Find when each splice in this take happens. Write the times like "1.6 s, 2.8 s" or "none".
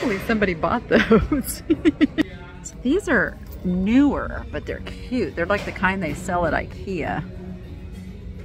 2.3 s